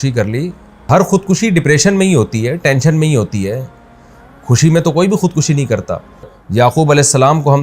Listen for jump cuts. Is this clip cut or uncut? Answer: cut